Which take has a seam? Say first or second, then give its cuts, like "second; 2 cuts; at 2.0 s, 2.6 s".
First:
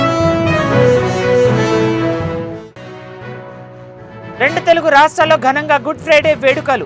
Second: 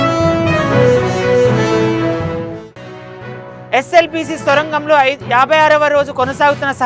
first; 1 cut; at 3.6 s